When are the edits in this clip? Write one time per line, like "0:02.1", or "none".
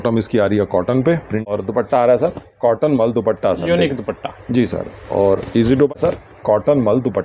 0:01.5
0:06.0